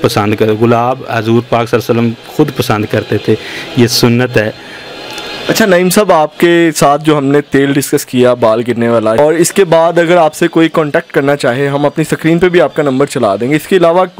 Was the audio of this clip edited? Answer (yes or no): no